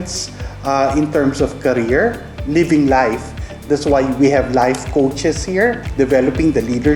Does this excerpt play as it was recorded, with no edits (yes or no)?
no